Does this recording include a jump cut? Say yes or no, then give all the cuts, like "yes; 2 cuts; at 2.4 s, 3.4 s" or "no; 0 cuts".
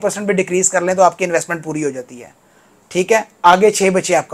no; 0 cuts